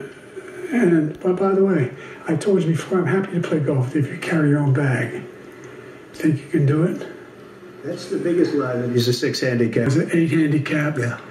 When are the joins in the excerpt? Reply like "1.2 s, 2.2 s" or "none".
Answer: 9.9 s